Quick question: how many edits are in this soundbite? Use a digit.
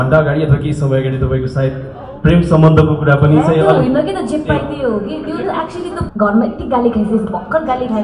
1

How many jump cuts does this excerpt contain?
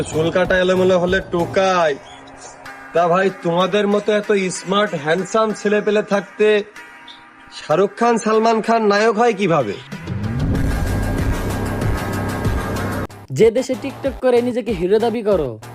1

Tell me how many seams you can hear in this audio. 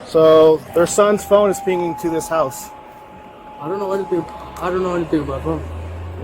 0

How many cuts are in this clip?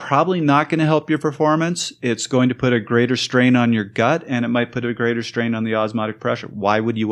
0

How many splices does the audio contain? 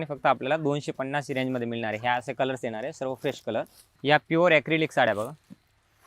0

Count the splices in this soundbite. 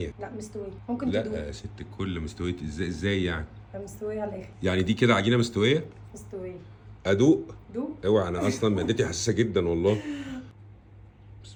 0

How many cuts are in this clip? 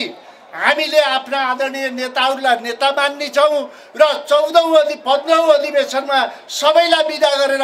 0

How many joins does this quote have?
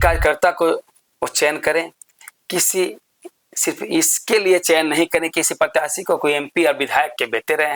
0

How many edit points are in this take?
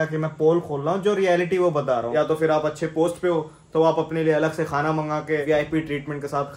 0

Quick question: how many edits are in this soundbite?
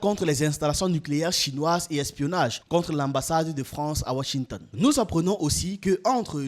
1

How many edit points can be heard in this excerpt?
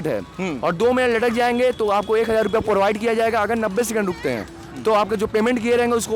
0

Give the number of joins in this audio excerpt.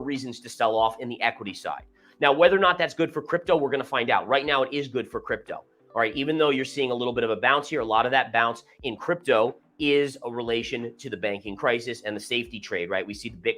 0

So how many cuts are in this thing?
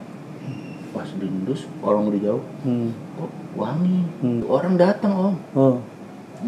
1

